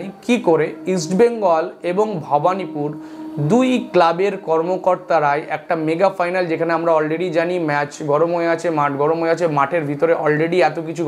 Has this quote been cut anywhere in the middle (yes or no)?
no